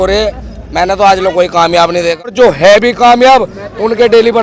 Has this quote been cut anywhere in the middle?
yes; 1 cut; at 2.3 s

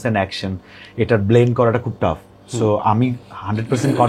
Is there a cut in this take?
no; 0 cuts

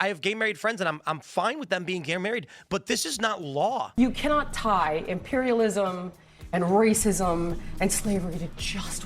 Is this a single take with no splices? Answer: no; 1 cut; at 3.9 s

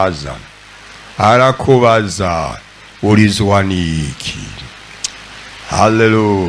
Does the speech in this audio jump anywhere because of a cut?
no; 0 cuts

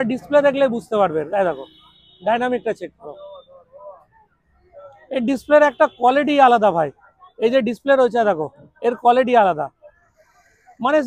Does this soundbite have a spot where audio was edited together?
no; 0 cuts

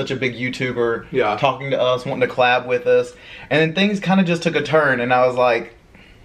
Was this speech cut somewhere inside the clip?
no; 0 cuts

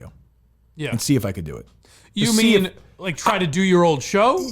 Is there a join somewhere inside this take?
no; 0 cuts

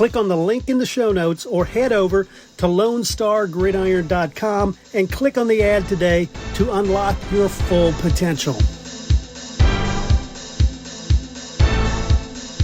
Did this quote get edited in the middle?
yes; 1 cut; at 8.8 s

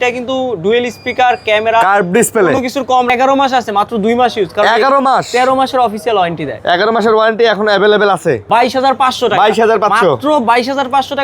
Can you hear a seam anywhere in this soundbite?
yes; 2 cuts; at 3.1 s, 8.4 s

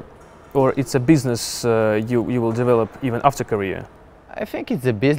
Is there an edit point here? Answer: no; 0 cuts

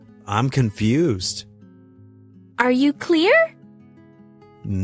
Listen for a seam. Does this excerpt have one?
yes; 1 cut; at 1.2 s

